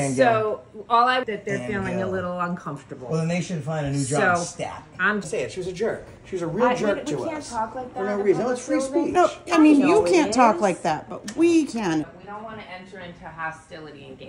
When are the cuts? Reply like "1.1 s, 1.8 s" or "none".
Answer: 1.2 s, 5.2 s, 12.1 s

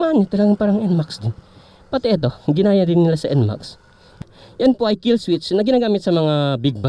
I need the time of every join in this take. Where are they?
4.2 s

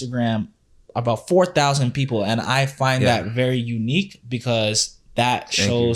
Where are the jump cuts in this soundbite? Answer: none

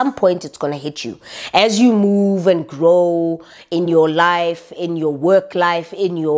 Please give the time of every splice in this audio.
none

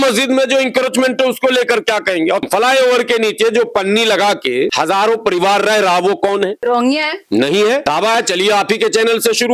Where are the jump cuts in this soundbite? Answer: 2.4 s, 4.7 s, 6.6 s, 7.8 s

